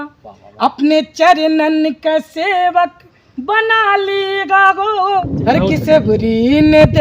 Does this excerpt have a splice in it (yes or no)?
yes